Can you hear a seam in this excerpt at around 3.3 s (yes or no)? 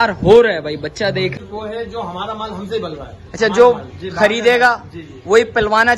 no